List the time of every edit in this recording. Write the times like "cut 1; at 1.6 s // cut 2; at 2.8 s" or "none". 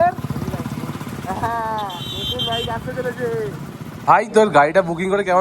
cut 1; at 4.0 s